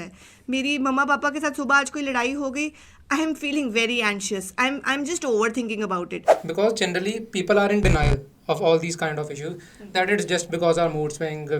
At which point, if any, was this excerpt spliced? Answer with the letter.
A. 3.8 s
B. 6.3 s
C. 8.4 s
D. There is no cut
B